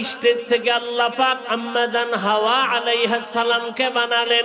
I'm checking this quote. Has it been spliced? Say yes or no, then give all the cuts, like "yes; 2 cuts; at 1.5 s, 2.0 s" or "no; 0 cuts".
no; 0 cuts